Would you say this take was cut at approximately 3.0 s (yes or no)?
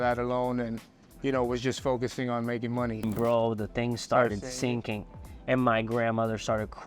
yes